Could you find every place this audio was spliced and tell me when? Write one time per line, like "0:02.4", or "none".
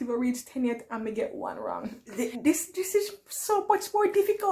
0:02.0